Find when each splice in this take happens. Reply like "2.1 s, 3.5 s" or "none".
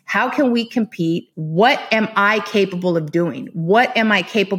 1.4 s